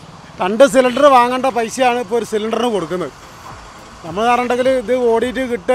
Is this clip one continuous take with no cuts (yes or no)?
yes